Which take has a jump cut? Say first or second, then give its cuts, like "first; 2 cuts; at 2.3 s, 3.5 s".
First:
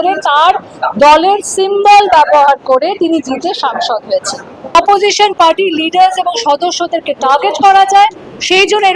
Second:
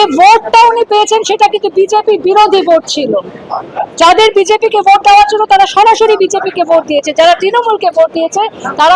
first; 1 cut; at 4.8 s